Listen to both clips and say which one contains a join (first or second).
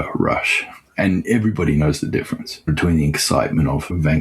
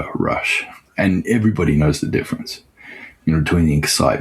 first